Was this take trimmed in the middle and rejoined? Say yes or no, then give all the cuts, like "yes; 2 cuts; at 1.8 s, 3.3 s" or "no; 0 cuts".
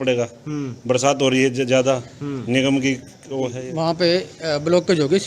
yes; 1 cut; at 3.6 s